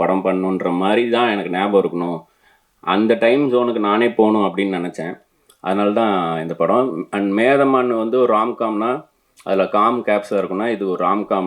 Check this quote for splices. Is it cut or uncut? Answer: uncut